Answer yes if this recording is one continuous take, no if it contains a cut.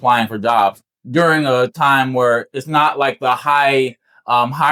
yes